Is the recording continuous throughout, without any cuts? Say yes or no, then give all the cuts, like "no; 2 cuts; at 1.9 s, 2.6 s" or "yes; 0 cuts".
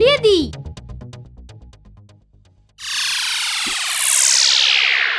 yes; 0 cuts